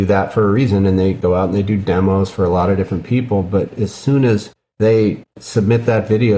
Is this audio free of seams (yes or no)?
yes